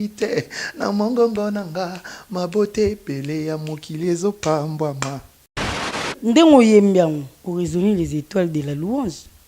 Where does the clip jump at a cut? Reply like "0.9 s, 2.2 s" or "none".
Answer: 5.7 s